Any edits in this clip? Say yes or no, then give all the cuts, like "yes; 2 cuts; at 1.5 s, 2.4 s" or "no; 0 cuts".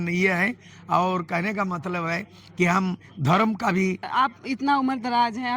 yes; 1 cut; at 4.0 s